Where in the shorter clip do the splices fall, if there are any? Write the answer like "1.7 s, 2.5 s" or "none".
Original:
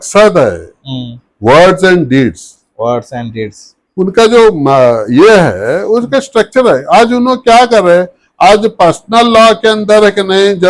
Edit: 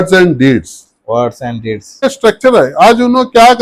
2.0 s